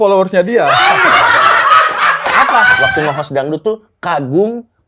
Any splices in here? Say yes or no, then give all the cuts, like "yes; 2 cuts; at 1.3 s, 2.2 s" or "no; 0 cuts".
yes; 1 cut; at 2.7 s